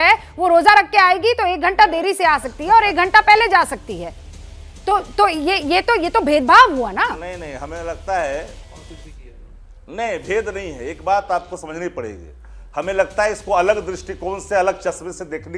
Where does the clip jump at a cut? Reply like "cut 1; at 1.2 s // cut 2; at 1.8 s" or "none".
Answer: none